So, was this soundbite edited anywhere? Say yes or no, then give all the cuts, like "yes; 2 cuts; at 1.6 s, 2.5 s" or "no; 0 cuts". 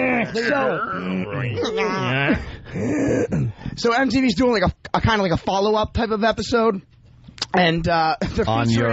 yes; 1 cut; at 1.5 s